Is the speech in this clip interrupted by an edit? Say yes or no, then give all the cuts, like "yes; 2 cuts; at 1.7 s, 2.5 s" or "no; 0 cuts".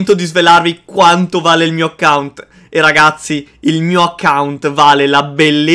no; 0 cuts